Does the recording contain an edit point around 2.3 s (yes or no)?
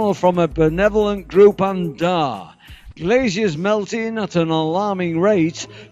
yes